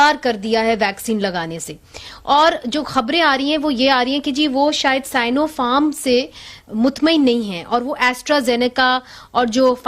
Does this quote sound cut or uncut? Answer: uncut